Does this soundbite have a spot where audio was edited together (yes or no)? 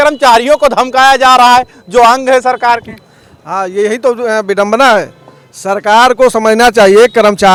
no